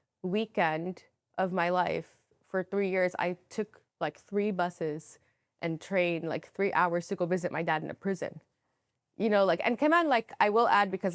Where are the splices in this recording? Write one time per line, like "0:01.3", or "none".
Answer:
none